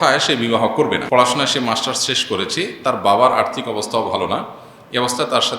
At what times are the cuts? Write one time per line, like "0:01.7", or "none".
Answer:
0:01.0